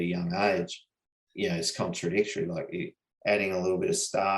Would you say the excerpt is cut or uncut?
cut